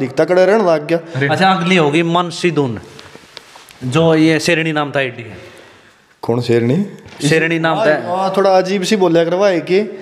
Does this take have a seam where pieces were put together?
yes; 1 cut; at 1.2 s

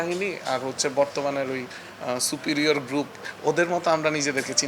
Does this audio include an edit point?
yes; 1 cut; at 3.2 s

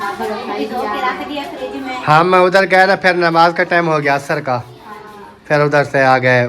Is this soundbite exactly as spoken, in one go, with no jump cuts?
yes; 0 cuts

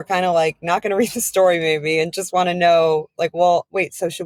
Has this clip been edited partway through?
no; 0 cuts

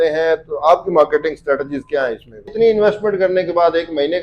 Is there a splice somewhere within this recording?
yes; 1 cut; at 2.5 s

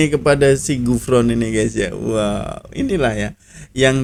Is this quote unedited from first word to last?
yes; 0 cuts

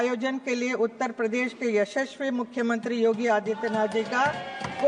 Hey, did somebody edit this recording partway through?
no; 0 cuts

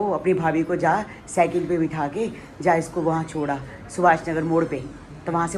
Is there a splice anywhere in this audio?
no; 0 cuts

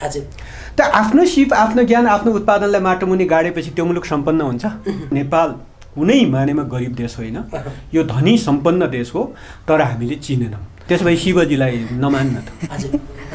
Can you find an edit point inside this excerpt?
yes; 2 cuts; at 5.1 s, 10.7 s

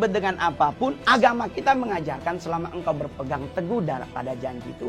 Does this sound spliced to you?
no; 0 cuts

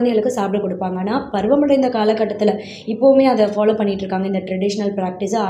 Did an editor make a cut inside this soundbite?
no; 0 cuts

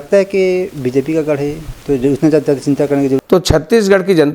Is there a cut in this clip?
yes; 1 cut; at 3.2 s

